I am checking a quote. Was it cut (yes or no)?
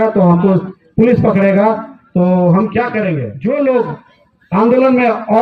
yes